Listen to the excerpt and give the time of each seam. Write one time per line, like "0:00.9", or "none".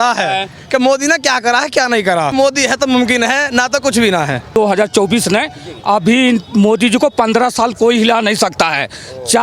0:02.3
0:04.6